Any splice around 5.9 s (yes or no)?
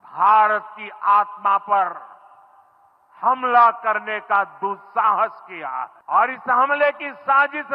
yes